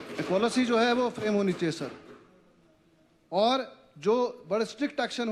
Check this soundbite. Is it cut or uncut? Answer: uncut